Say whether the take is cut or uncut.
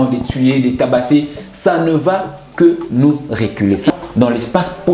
cut